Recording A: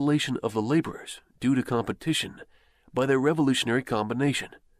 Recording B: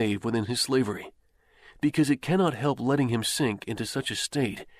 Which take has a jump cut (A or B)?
A